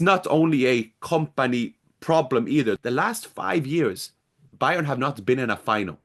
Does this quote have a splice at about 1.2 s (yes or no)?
no